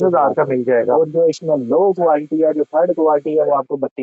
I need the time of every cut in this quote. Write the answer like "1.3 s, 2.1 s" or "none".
none